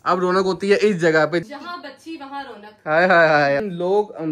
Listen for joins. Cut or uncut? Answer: cut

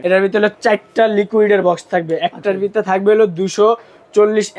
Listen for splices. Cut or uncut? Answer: uncut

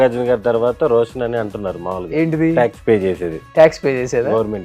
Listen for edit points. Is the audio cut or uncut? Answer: uncut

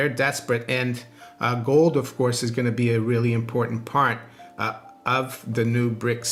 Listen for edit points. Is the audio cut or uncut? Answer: uncut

